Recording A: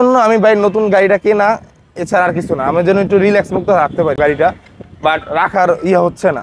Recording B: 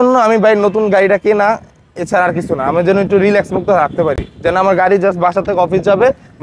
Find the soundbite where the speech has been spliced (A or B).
A